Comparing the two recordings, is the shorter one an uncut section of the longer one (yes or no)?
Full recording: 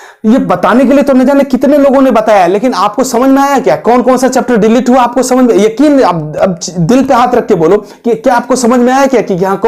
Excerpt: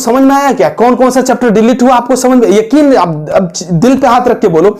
yes